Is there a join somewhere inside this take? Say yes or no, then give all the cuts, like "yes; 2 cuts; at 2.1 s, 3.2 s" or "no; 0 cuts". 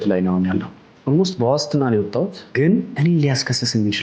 yes; 1 cut; at 2.8 s